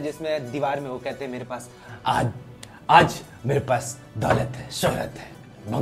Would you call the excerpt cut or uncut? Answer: uncut